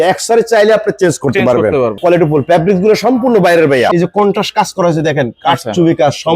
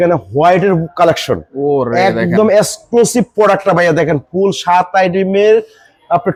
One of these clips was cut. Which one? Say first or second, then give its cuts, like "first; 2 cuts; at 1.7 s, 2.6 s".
first; 2 cuts; at 2.0 s, 3.9 s